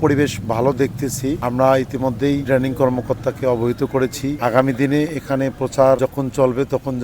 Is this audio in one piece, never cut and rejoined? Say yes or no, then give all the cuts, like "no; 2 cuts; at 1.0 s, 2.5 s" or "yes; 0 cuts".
no; 4 cuts; at 1.4 s, 2.4 s, 4.4 s, 6.0 s